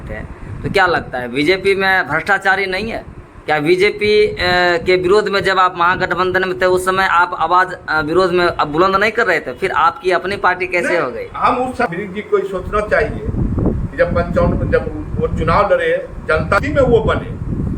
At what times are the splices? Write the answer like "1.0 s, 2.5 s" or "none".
11.9 s, 16.6 s